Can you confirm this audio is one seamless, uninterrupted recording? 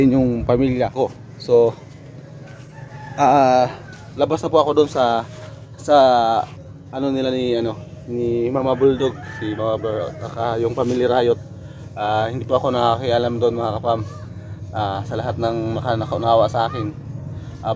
no; 1 cut; at 0.9 s

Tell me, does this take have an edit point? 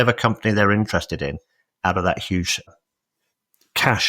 yes; 1 cut; at 2.7 s

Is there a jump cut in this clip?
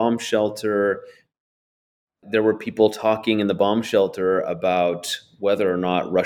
yes; 1 cut; at 2.0 s

